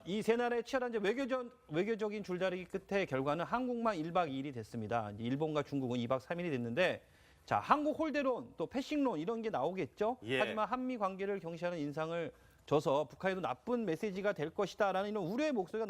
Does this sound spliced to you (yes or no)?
yes